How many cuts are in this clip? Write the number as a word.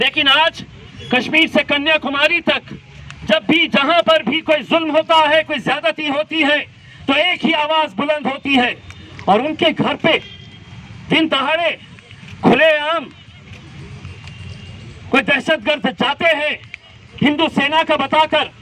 zero